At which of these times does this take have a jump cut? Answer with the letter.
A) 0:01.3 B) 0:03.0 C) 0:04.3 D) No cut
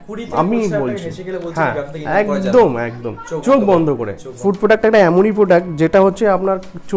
C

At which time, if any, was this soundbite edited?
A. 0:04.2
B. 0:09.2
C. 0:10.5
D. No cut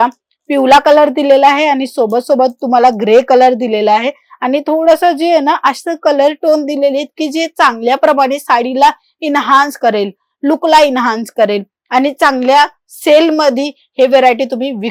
D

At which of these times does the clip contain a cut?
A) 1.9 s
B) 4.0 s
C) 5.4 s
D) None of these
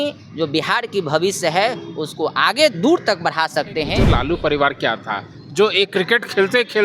B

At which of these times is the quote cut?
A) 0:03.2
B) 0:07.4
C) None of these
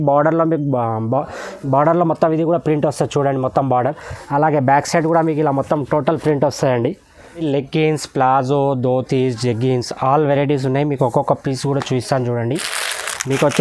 B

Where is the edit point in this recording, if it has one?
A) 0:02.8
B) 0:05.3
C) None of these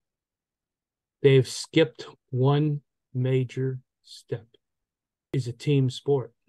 B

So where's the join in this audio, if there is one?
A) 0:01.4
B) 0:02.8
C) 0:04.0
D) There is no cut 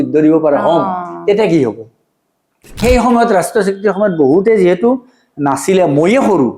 B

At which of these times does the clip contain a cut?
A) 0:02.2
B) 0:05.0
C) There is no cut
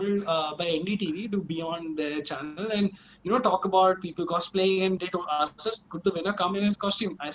B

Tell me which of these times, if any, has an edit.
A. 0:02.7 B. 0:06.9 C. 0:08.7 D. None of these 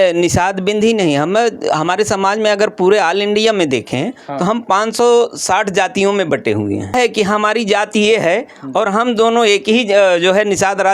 B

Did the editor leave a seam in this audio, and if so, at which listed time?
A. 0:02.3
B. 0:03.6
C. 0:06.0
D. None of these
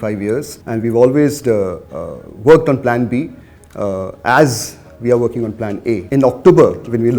C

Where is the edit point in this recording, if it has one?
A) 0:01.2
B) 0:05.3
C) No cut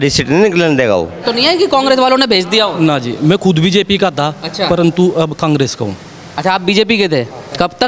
A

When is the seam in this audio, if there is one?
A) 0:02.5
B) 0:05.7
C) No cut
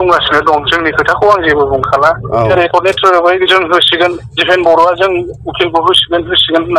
A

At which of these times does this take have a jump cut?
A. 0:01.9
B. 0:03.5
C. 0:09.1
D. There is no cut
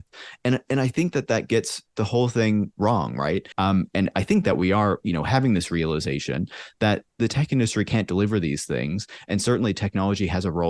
B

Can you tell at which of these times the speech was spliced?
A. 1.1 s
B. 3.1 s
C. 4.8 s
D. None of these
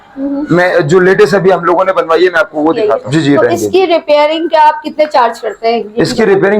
B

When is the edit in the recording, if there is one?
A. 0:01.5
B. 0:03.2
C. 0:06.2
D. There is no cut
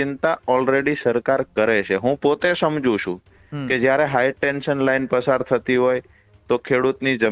D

